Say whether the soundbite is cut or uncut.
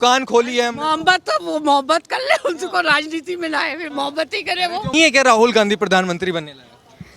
cut